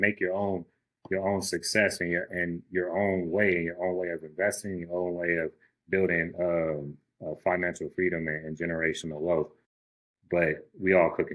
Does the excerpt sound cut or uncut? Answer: uncut